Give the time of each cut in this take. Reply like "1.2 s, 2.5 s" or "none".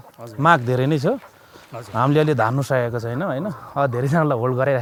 none

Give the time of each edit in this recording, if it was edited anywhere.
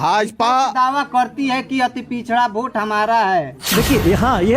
3.6 s

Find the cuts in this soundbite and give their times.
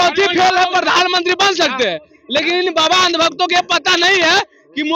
none

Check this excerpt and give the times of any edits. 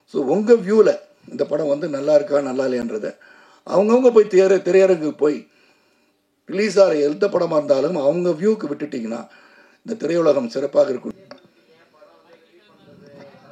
11.0 s

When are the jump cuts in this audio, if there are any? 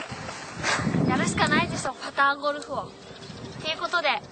1.7 s

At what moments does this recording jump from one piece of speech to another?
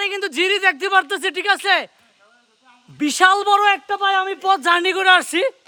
none

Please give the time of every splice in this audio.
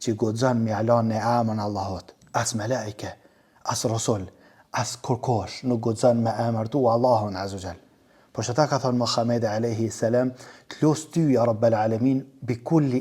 2.1 s

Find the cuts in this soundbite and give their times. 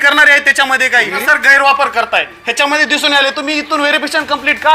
1.2 s

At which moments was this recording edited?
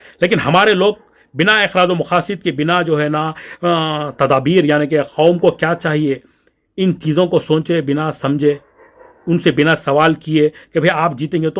none

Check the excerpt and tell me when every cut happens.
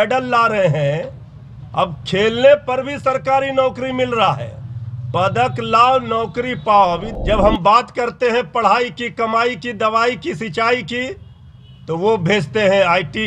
7.1 s

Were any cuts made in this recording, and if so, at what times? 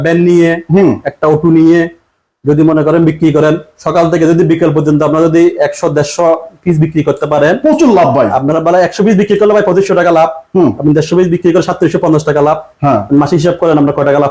none

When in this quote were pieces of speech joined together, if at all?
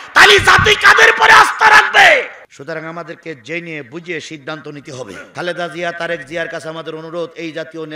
2.5 s, 5.2 s

